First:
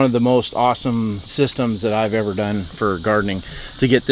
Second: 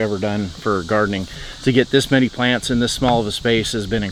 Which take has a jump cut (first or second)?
first